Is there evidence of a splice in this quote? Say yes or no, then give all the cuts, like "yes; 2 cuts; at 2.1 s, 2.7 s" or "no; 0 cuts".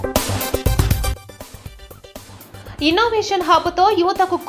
no; 0 cuts